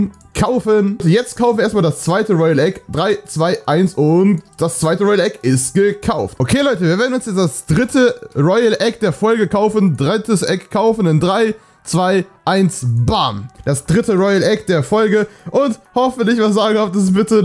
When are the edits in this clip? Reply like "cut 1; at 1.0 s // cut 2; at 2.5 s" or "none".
cut 1; at 1.0 s // cut 2; at 6.3 s // cut 3; at 13.5 s